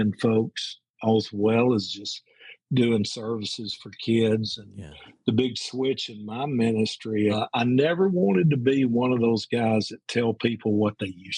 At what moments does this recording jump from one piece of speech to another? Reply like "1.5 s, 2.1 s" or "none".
7.3 s